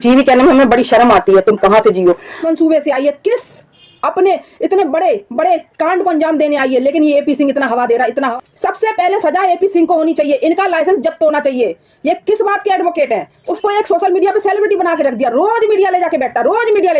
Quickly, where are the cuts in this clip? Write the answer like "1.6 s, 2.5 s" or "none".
2.4 s, 8.3 s, 13.4 s

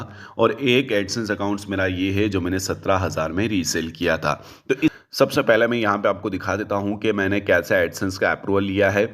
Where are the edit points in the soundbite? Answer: 4.9 s

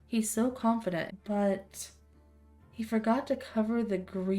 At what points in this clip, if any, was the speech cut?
1.1 s

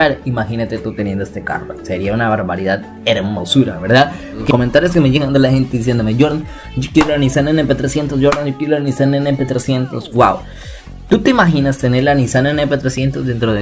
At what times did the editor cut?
4.5 s

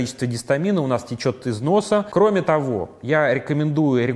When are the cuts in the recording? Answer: 2.1 s

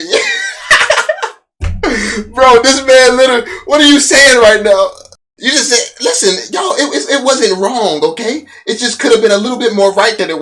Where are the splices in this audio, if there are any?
5.3 s

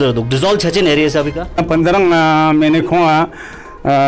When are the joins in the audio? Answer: 1.6 s

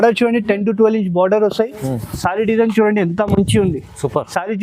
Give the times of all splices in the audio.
none

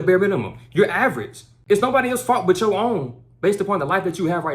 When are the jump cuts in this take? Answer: 1.5 s

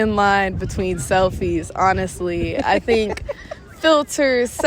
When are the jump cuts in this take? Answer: none

